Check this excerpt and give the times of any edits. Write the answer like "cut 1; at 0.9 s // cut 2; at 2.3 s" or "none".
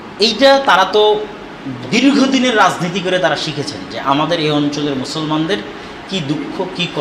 none